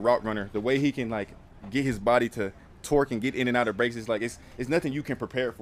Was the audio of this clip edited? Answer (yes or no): no